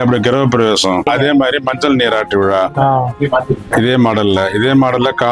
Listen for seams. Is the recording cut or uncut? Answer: cut